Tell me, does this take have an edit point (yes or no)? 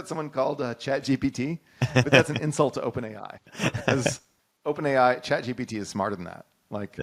no